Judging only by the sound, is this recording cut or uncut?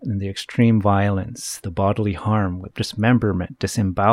cut